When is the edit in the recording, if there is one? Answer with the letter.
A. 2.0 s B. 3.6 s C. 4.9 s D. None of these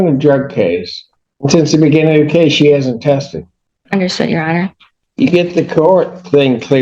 C